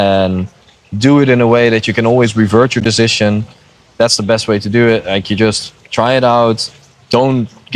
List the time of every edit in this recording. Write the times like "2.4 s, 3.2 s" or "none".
none